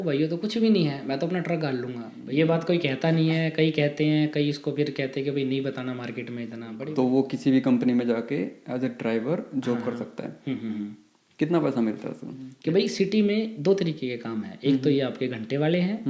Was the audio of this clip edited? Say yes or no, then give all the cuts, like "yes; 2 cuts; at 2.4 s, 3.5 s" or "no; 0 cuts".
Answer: yes; 3 cuts; at 2.1 s, 6.6 s, 12.5 s